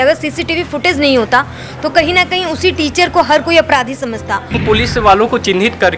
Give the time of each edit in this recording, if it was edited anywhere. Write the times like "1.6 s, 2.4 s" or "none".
4.6 s

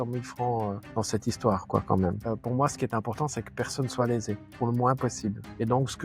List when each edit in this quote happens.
2.2 s

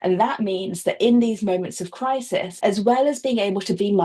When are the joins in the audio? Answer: 2.5 s

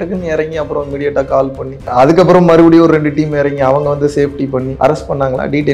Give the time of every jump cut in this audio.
1.8 s, 4.7 s

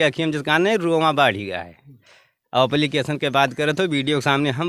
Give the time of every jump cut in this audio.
none

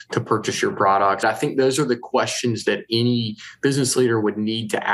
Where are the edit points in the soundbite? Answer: 1.2 s

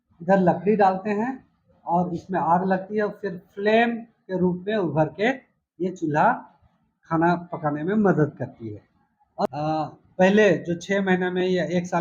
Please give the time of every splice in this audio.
9.5 s

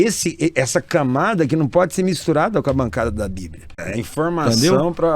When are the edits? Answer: 3.9 s

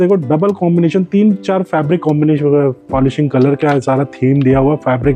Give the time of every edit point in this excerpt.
none

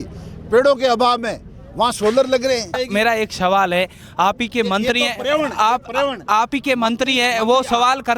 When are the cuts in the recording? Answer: 2.8 s

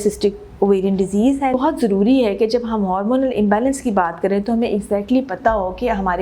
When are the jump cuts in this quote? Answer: 1.6 s

